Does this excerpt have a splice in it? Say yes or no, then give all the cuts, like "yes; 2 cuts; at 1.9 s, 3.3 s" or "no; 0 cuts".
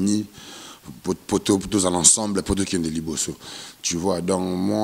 no; 0 cuts